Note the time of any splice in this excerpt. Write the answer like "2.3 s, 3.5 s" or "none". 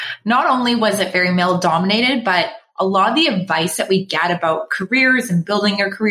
none